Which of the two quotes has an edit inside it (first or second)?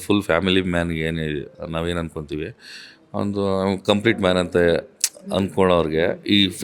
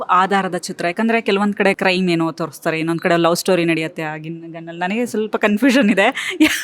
second